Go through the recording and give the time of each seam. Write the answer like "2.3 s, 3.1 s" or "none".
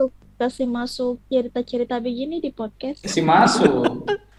none